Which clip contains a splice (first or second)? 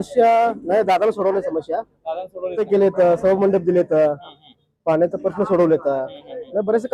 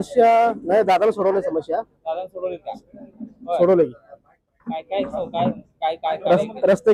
first